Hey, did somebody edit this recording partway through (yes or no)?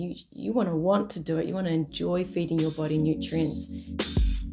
yes